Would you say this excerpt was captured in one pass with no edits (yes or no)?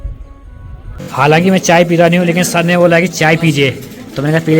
no